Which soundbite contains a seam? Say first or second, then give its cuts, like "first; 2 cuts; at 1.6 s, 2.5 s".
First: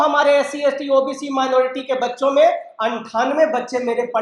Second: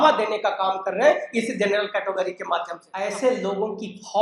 second; 1 cut; at 2.8 s